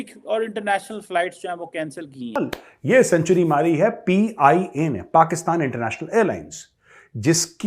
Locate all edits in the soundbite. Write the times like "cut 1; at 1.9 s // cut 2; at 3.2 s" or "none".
cut 1; at 2.4 s